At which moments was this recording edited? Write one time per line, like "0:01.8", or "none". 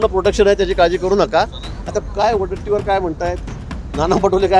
none